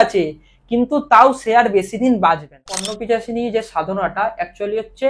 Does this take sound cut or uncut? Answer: cut